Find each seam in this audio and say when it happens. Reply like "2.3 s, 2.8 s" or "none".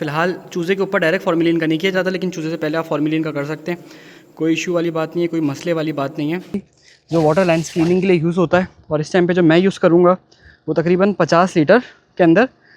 6.7 s

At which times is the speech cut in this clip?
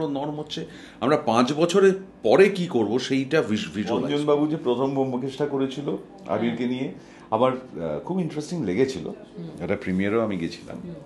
4.1 s

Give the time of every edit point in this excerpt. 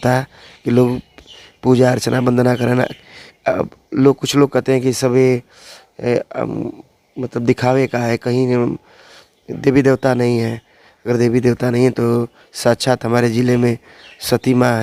none

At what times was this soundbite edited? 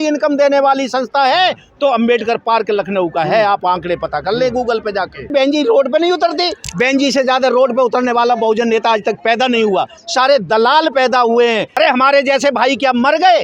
5.3 s, 11.7 s

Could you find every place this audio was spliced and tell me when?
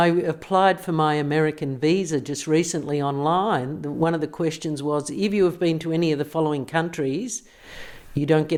none

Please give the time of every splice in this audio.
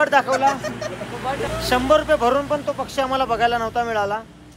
1.4 s

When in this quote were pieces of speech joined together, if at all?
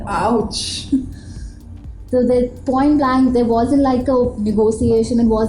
none

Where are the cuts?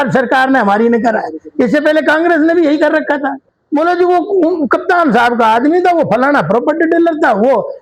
3.5 s

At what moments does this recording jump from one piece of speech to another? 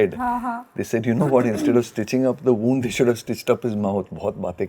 none

